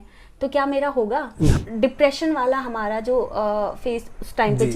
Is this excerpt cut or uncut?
cut